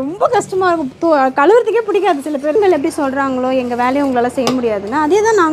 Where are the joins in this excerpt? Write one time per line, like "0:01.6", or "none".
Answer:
0:02.5